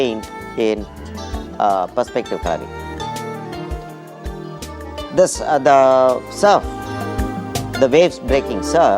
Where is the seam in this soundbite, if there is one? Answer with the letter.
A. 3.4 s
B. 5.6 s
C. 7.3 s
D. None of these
D